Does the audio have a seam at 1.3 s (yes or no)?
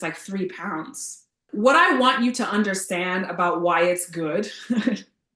yes